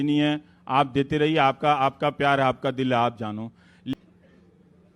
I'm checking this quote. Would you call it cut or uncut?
cut